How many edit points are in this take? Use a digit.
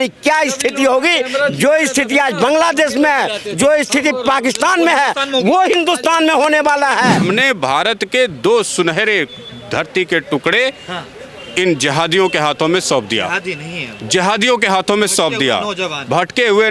1